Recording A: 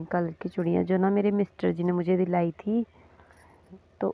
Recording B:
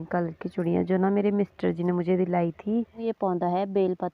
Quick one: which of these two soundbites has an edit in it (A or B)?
B